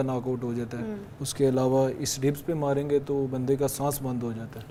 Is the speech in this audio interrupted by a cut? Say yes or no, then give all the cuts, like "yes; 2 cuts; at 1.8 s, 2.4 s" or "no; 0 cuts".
no; 0 cuts